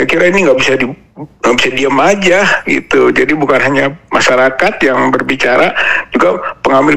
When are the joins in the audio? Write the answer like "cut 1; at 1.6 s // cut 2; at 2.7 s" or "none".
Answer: none